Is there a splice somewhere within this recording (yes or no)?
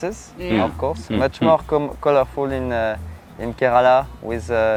no